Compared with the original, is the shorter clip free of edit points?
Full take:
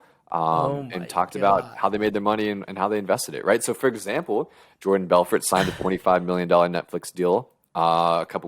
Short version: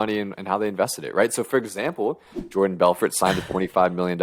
yes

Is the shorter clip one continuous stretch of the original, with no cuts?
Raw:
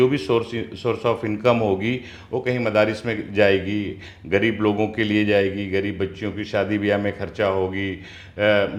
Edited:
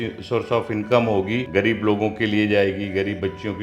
no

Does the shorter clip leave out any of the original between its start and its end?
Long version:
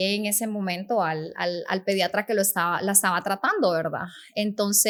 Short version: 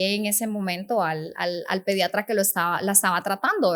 no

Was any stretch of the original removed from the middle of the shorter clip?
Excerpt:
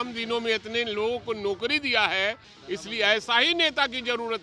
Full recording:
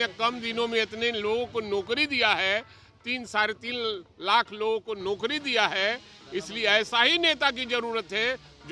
yes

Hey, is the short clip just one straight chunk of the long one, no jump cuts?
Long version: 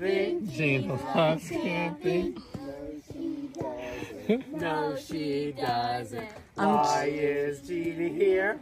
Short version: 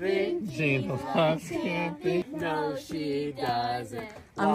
no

